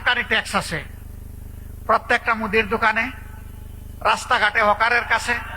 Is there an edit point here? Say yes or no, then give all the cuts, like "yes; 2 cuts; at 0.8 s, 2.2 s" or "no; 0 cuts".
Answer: no; 0 cuts